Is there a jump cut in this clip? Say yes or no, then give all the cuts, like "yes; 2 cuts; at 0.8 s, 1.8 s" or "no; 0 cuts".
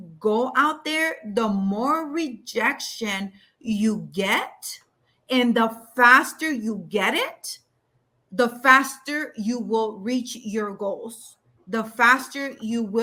no; 0 cuts